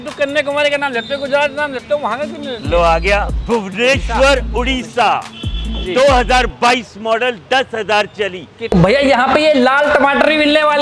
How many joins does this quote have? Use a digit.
1